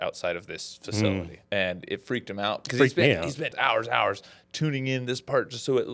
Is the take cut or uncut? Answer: cut